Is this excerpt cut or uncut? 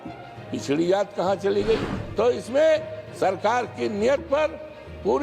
cut